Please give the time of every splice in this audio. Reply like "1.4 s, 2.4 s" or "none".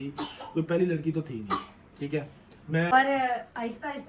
2.9 s

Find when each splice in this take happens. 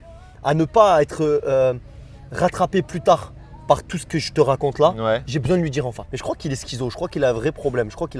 6.0 s

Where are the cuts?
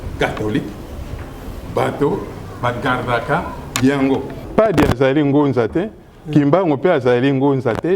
4.4 s

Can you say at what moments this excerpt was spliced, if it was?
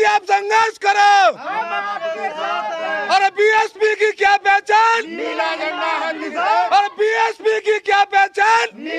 none

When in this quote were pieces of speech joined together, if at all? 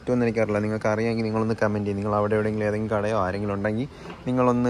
none

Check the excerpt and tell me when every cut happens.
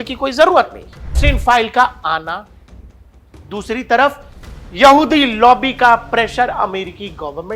1.2 s

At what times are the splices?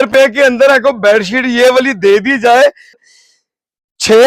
3.0 s

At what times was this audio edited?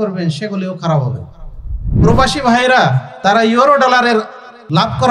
1.8 s

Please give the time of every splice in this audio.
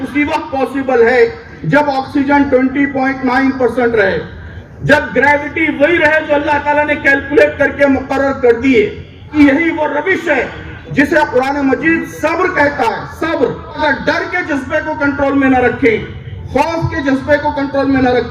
9.3 s, 13.8 s

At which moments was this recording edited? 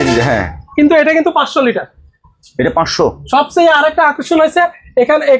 none

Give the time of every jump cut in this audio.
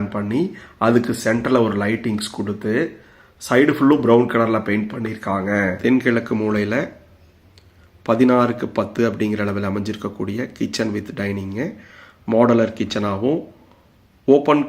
5.8 s

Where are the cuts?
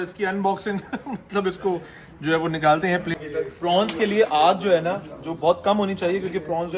3.1 s

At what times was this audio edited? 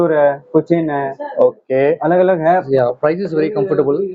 2.7 s

